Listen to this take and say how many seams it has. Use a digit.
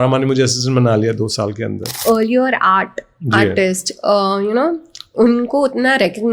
1